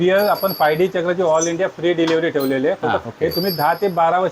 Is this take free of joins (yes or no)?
no